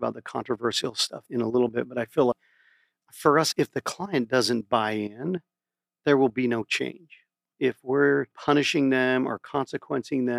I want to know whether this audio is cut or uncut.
cut